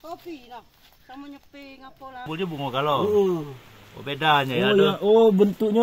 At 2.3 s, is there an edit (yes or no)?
yes